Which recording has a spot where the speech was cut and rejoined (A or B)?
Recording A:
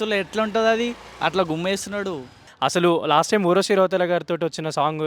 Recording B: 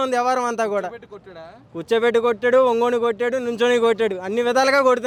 A